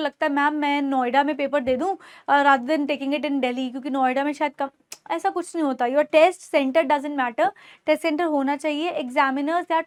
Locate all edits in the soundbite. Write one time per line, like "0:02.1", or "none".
none

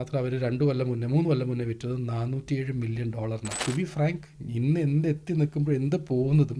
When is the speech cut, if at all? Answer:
0:03.6

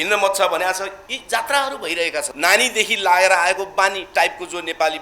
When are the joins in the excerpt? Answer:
0:02.3

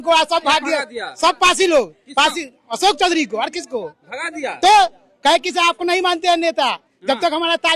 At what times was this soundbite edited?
none

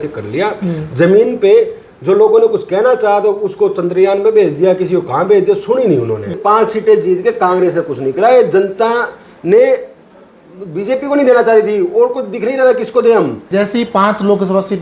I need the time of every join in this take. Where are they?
0:06.3
0:13.4

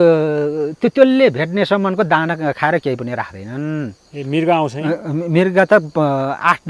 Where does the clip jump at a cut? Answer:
none

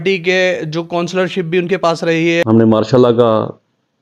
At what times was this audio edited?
0:02.4

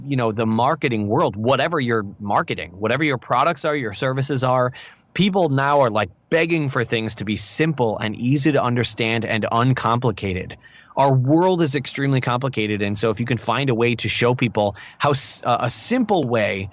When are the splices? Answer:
none

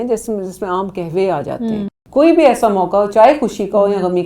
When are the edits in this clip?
0:01.9

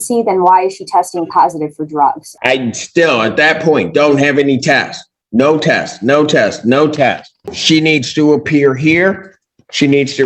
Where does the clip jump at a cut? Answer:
0:02.3
0:07.3

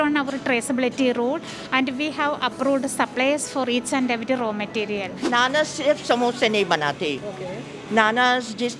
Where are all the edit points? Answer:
0:05.2

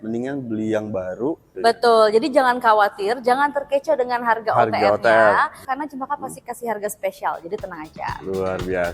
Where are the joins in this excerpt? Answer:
0:01.5
0:05.6

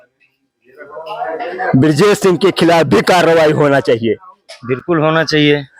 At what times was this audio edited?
none

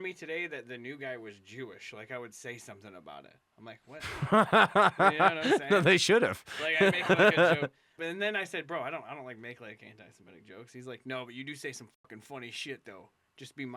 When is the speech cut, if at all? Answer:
0:07.9

